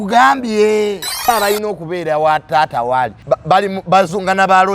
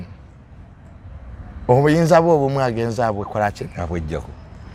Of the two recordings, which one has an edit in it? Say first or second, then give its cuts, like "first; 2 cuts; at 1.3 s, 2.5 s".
first; 2 cuts; at 1.3 s, 3.2 s